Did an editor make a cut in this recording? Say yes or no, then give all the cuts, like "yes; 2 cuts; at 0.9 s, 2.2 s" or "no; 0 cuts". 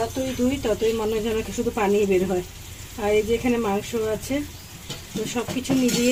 no; 0 cuts